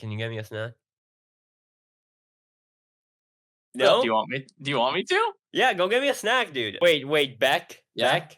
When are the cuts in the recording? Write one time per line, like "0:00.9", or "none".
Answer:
0:06.6